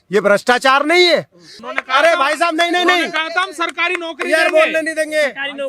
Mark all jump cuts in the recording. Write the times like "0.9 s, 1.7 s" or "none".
1.6 s